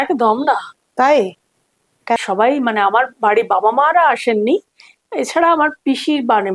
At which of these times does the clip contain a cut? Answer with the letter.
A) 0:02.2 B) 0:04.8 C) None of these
A